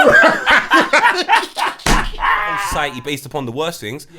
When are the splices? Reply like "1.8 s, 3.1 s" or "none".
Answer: 2.7 s